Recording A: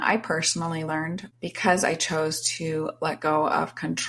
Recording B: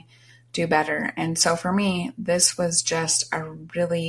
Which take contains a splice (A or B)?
A